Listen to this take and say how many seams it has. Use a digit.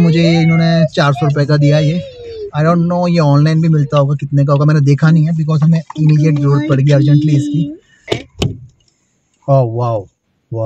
0